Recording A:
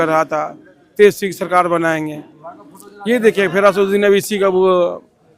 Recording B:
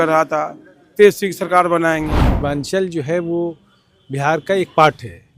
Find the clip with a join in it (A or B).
B